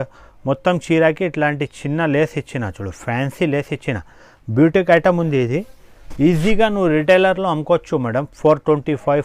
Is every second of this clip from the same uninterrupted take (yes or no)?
yes